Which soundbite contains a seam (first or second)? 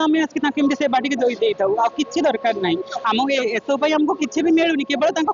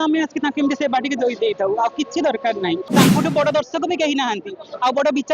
second